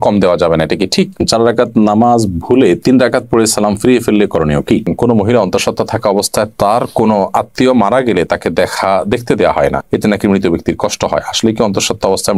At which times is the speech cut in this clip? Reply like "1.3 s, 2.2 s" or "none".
1.2 s, 4.9 s